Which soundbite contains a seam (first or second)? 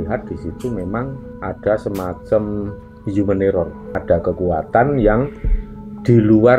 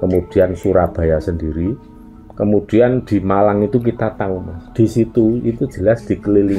first